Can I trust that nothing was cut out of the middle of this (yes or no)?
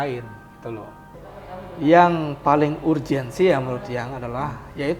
no